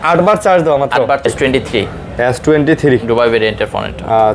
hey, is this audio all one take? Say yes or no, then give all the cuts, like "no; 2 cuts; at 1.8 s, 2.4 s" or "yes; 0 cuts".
no; 1 cut; at 1.2 s